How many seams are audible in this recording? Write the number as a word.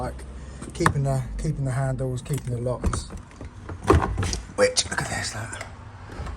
one